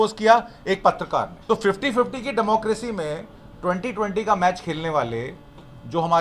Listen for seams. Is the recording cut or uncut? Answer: cut